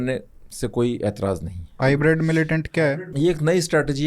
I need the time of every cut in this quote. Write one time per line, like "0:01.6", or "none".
0:01.8
0:02.8